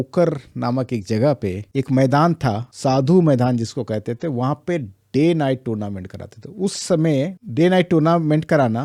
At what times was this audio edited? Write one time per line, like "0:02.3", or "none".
none